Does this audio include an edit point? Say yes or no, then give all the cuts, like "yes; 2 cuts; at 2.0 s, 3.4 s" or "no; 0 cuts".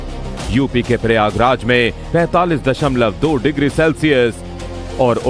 no; 0 cuts